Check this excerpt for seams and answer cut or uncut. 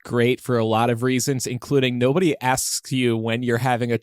uncut